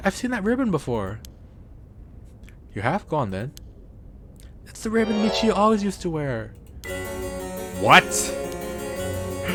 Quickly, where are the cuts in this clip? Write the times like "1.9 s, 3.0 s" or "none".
none